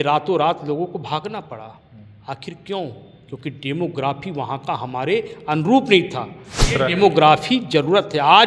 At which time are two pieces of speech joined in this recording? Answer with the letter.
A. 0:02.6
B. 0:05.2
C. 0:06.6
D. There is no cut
C